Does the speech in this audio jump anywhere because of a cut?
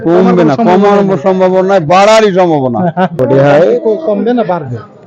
yes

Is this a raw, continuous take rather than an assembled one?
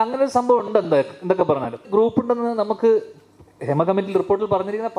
no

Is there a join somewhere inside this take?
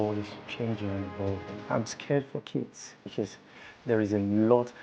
no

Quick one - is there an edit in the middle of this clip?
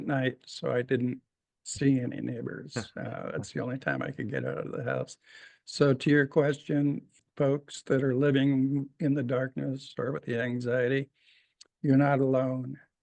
no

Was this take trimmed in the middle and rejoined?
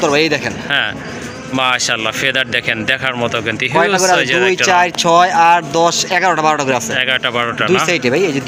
no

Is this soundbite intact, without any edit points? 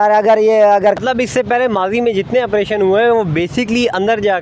no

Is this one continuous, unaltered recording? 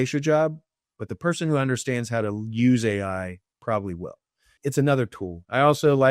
no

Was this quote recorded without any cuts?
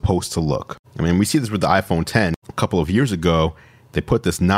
yes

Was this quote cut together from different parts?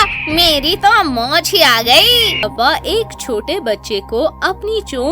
yes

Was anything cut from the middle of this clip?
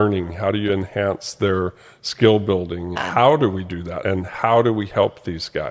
yes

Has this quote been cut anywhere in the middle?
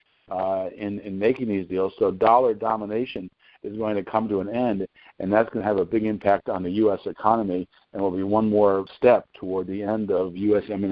yes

